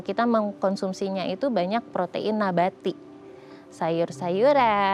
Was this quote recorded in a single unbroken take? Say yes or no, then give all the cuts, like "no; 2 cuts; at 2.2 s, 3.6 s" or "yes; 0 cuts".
yes; 0 cuts